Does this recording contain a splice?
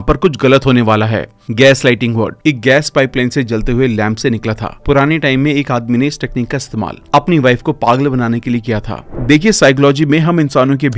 yes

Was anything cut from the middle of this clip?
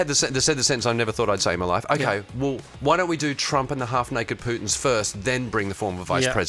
no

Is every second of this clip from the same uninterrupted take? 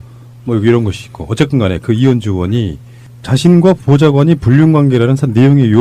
no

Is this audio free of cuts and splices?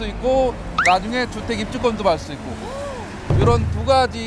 yes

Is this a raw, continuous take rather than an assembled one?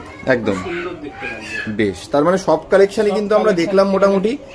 yes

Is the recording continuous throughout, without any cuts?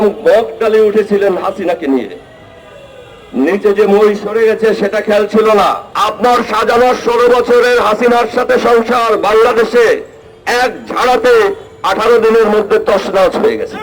no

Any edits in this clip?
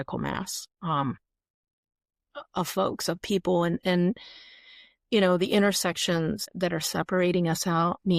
yes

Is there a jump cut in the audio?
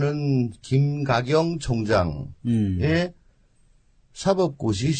no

